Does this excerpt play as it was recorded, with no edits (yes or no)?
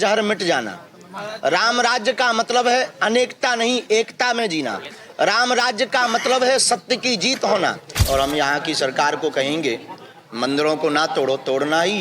no